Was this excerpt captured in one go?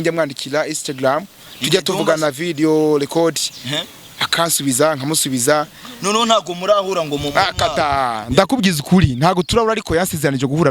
yes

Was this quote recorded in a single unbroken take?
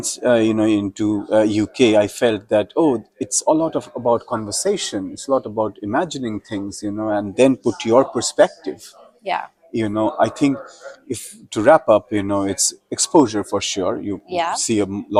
yes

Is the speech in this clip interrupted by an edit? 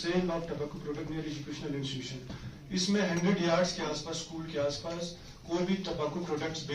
no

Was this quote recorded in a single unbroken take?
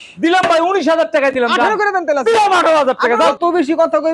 no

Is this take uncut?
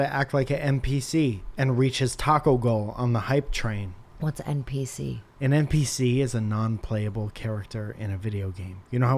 no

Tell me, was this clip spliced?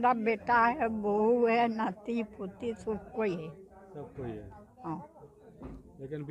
no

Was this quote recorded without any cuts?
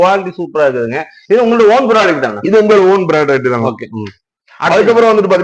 yes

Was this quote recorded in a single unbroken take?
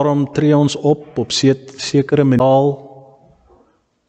no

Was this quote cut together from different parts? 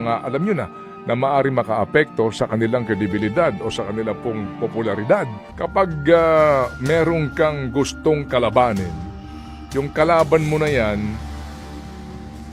yes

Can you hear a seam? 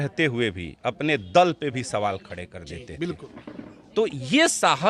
no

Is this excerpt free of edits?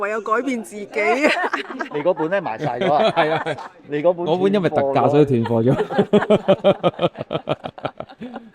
no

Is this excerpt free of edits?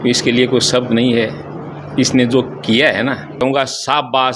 no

